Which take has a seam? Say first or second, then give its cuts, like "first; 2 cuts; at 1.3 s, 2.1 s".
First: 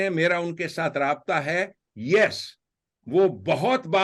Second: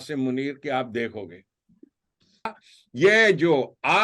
second; 1 cut; at 2.5 s